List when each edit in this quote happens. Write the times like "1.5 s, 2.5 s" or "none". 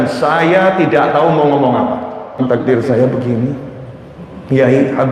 2.4 s